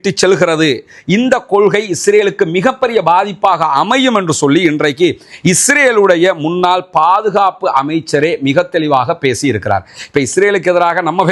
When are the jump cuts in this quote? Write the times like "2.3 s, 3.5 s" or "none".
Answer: none